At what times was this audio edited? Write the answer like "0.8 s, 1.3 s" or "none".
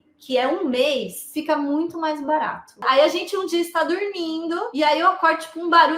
1.2 s, 2.8 s